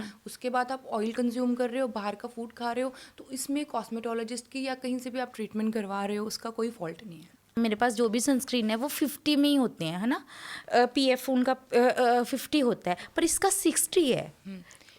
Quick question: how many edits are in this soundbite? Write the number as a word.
one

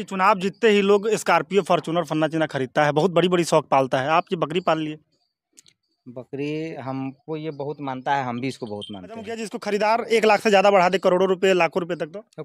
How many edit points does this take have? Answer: two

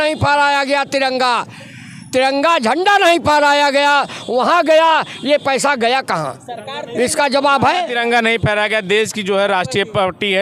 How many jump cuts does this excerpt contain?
zero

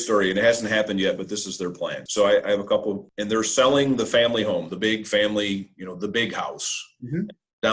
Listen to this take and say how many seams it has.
two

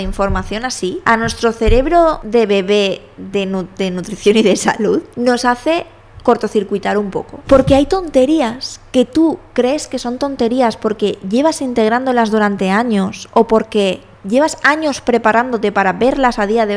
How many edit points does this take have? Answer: four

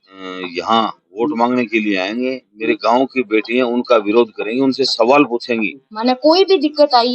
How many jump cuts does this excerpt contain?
one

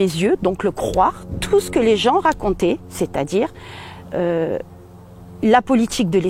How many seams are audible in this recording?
zero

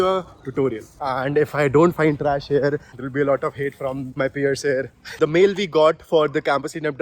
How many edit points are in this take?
three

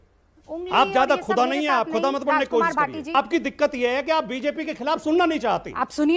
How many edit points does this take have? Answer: one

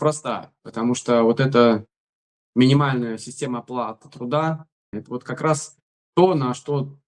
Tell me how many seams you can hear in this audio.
one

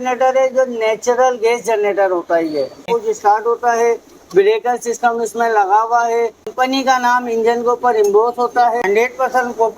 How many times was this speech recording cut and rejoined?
three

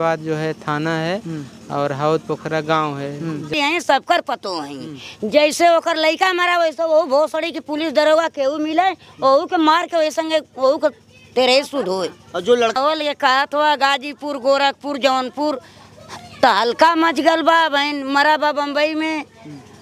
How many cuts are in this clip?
two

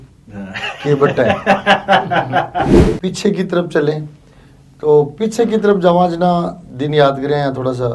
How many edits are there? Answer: one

